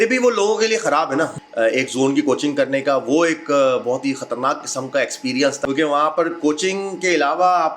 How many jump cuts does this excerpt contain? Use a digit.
2